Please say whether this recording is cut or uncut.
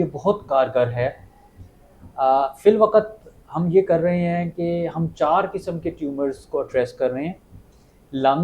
uncut